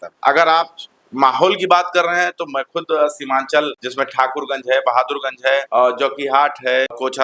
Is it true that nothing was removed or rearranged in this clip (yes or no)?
yes